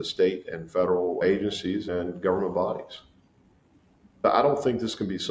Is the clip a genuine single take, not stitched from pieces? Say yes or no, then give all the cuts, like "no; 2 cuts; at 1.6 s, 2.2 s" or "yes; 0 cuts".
no; 1 cut; at 4.2 s